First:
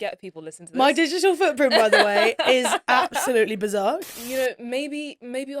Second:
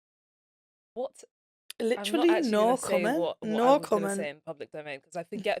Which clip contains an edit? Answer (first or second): first